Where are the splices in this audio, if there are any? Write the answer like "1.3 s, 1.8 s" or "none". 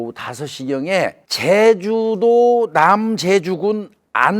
1.3 s